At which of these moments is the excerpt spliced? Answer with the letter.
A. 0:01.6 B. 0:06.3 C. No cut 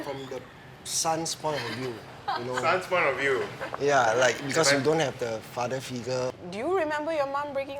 B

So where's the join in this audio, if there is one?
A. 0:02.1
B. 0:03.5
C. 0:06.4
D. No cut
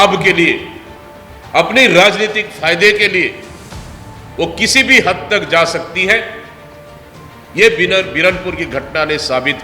D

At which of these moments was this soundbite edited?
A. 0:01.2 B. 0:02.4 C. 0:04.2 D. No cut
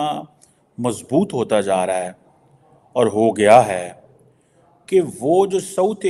D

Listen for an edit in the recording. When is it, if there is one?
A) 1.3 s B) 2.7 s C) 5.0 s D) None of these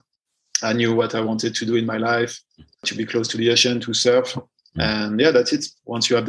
B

